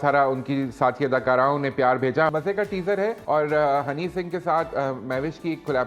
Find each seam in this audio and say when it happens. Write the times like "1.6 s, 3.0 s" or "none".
2.3 s, 3.2 s